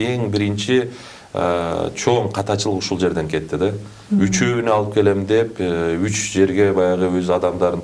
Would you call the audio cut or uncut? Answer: uncut